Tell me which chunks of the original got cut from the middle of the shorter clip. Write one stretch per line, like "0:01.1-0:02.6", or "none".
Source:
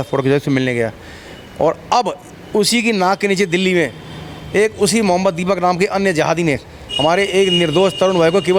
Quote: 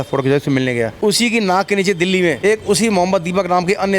0:00.9-0:02.5
0:03.9-0:04.5

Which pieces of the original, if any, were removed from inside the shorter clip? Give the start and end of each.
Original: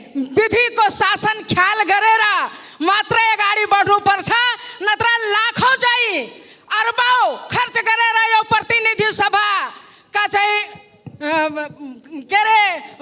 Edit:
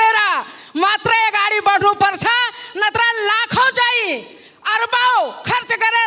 none

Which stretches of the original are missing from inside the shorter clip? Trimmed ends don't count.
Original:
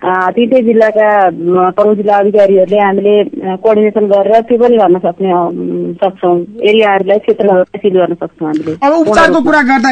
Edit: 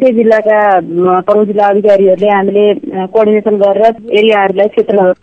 0:04.5-0:06.5

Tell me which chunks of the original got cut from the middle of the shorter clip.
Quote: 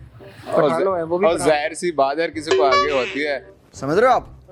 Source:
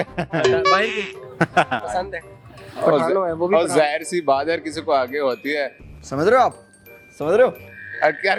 none

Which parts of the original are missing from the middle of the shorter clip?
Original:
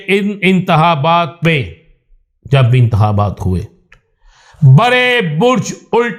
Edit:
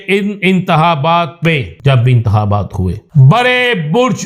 0:01.7-0:02.4
0:03.7-0:04.5

